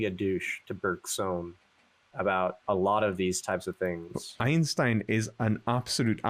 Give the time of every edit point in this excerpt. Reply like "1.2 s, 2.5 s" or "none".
none